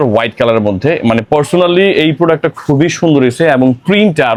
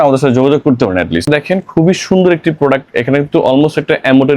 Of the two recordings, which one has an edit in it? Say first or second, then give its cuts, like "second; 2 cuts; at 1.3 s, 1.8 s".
second; 1 cut; at 1.2 s